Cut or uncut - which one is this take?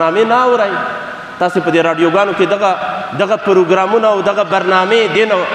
uncut